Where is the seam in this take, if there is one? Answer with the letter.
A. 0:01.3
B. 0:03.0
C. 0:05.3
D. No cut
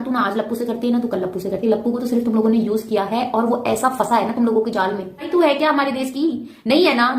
C